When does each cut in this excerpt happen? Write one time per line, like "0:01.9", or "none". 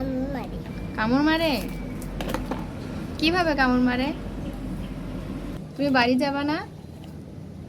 0:05.5